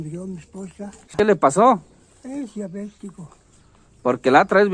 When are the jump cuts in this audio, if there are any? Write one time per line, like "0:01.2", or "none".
0:01.1

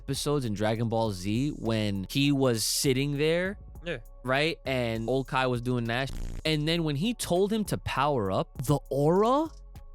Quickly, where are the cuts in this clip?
0:02.0
0:05.1
0:06.1
0:08.6

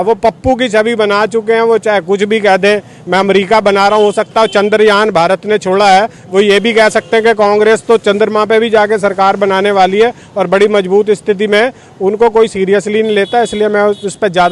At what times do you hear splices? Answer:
none

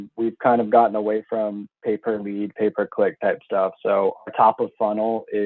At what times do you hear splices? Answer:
none

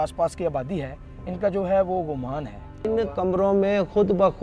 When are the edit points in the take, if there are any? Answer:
0:02.9

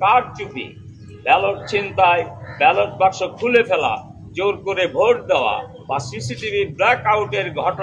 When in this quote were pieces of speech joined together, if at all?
none

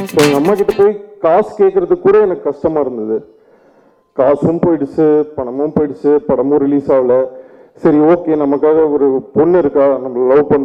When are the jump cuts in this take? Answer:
none

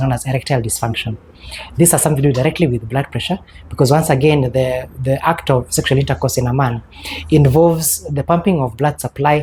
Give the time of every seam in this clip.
none

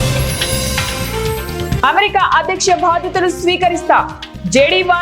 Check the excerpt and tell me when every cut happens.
0:01.8

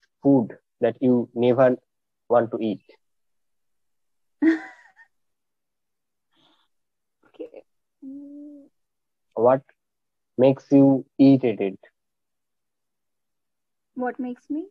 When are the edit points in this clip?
0:09.3

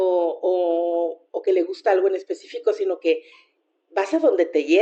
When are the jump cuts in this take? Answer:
none

